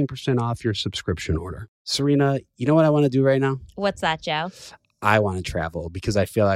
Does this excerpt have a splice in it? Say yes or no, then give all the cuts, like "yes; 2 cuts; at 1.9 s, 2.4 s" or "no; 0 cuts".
yes; 1 cut; at 1.6 s